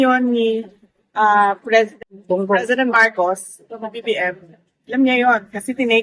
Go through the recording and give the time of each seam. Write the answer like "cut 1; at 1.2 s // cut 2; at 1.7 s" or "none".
cut 1; at 1.9 s